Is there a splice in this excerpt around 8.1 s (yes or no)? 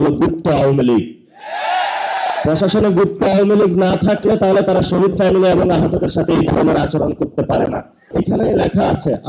yes